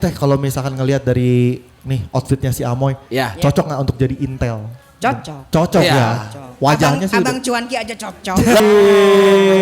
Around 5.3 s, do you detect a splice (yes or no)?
no